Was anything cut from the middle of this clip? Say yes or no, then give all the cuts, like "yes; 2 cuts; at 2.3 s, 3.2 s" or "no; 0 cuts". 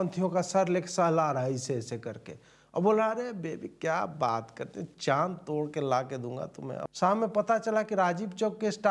yes; 1 cut; at 6.9 s